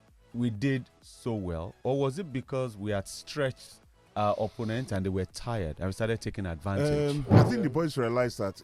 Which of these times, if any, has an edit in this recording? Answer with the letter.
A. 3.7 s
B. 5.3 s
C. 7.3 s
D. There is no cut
C